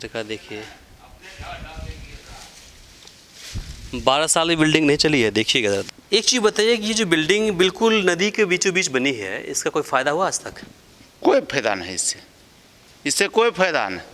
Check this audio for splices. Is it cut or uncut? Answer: cut